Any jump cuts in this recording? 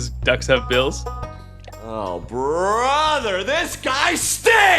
no; 0 cuts

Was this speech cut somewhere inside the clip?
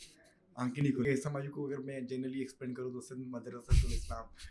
yes; 1 cut; at 1.1 s

